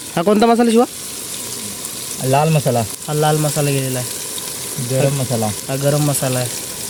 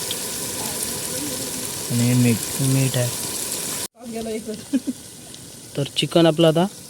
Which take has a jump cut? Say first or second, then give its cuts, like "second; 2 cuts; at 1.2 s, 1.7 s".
second; 1 cut; at 3.9 s